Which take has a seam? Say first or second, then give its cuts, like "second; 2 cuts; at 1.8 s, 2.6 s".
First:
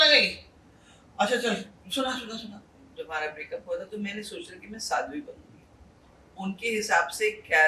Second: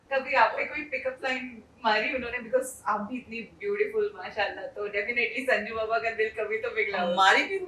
first; 2 cuts; at 2.7 s, 6.1 s